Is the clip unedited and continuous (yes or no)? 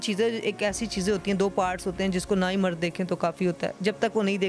yes